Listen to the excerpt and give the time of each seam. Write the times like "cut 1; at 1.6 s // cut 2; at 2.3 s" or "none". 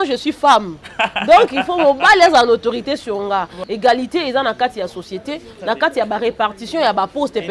cut 1; at 3.6 s